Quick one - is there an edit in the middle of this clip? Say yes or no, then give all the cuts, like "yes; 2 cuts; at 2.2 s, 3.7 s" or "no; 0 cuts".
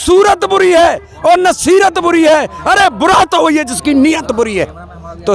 no; 0 cuts